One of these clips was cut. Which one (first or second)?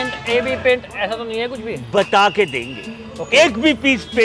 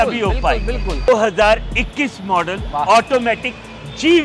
second